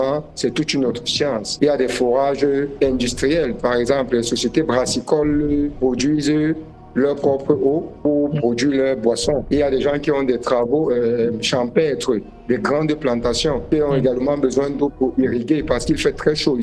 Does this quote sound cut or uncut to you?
uncut